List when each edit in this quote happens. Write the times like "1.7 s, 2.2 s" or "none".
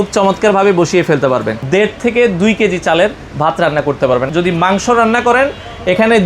1.6 s, 4.3 s